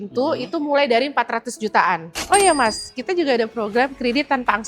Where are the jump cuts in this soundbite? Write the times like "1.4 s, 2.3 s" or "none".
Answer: 2.1 s

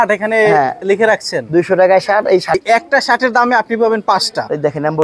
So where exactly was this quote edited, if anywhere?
2.6 s

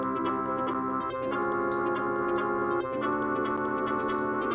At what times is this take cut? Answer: 2.8 s

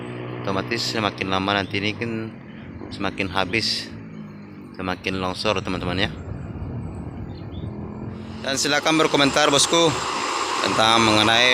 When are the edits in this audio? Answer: 8.6 s

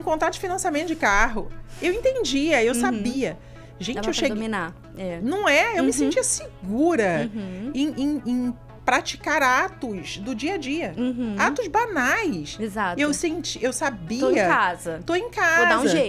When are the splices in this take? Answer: none

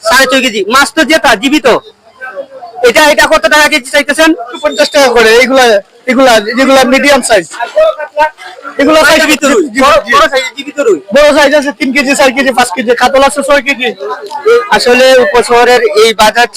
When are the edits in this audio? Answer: 4.5 s, 9.3 s, 14.6 s

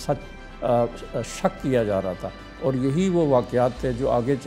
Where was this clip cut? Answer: 2.4 s

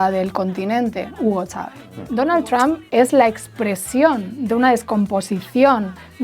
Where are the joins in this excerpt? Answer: 2.0 s

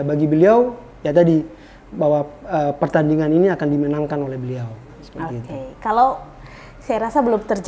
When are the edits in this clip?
none

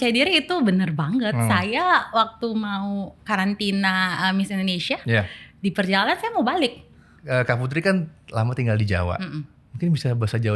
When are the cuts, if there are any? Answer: 7.1 s

